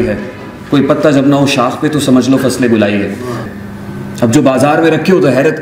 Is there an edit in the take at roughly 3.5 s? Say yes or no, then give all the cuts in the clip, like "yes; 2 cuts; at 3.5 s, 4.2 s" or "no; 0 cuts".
yes; 1 cut; at 3.5 s